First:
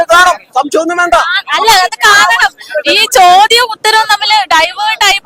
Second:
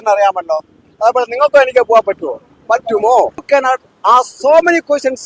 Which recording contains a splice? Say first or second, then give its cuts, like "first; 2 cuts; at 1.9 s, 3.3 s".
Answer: second; 1 cut; at 3.4 s